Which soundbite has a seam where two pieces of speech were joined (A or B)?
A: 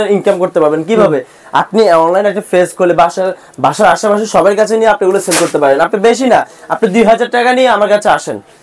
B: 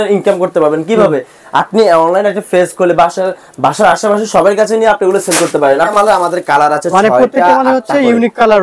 B